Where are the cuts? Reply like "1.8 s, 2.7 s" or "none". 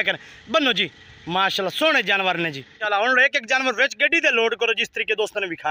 2.7 s